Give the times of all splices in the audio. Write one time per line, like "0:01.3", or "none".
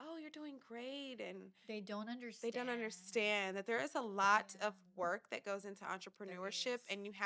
none